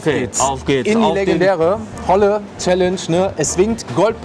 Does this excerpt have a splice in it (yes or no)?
no